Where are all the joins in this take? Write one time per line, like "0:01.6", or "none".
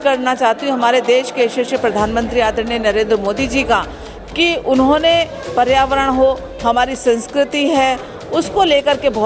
none